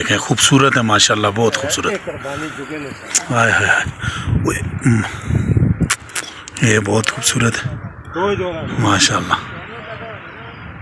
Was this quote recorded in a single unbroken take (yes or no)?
yes